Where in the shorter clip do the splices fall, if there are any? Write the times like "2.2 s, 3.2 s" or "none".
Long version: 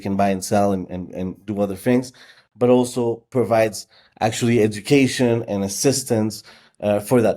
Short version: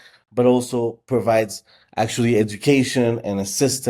none